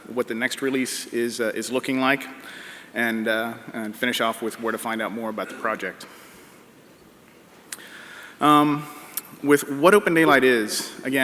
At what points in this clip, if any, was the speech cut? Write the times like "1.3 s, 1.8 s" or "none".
3.9 s